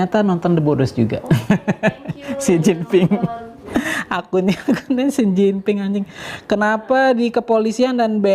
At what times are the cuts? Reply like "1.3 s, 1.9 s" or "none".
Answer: 3.5 s